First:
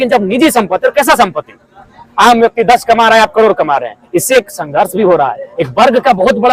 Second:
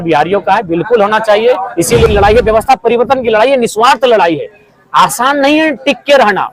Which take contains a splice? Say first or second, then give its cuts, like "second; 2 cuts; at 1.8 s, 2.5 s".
second; 1 cut; at 2.1 s